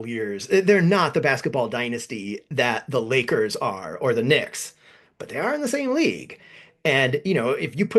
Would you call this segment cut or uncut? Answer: uncut